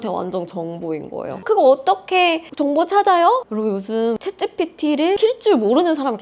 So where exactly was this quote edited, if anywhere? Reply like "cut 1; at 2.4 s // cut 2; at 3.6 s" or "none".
cut 1; at 1.3 s // cut 2; at 4.2 s // cut 3; at 5.2 s